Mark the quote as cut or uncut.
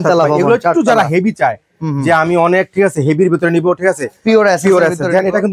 uncut